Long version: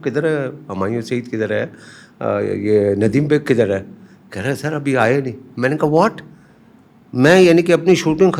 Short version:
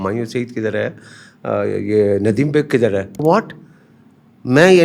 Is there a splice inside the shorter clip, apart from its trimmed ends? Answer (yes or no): yes